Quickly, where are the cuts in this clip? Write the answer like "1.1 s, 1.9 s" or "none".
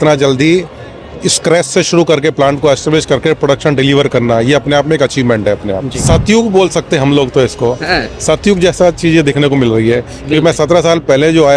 5.9 s